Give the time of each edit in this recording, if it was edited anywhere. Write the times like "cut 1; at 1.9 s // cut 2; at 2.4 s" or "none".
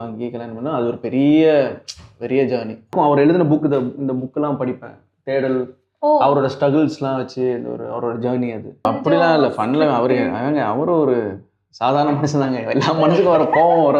cut 1; at 2.9 s // cut 2; at 8.9 s